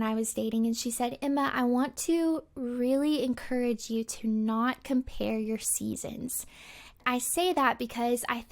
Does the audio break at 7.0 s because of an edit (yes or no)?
yes